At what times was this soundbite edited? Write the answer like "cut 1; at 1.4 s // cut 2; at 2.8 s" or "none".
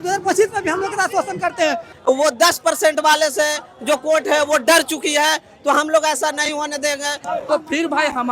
cut 1; at 1.9 s // cut 2; at 7.1 s